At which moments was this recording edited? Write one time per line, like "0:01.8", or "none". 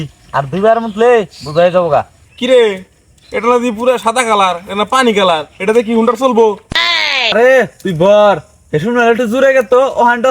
0:02.2
0:07.3